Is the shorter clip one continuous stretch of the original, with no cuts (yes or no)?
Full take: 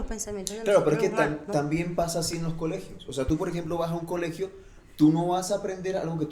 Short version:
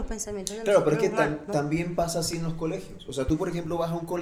yes